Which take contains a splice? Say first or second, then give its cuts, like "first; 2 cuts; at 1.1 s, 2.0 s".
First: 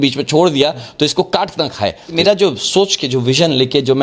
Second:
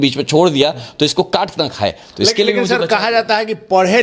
first; 1 cut; at 2.1 s